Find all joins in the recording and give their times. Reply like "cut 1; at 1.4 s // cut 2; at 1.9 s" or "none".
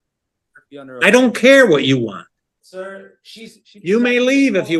none